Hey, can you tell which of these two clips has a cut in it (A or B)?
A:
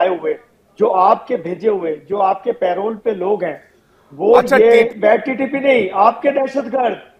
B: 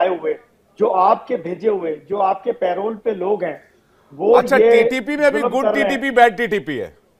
A